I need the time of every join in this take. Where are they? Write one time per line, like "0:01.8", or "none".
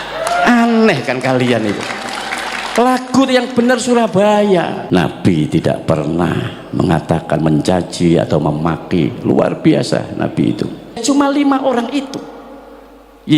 0:04.8
0:11.0